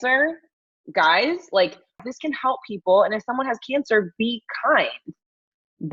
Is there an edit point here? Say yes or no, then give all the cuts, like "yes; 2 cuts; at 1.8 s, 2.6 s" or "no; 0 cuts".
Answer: yes; 1 cut; at 2.0 s